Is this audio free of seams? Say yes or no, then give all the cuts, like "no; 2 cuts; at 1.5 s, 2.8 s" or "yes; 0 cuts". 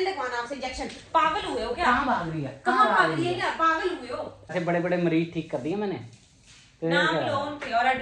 no; 1 cut; at 4.5 s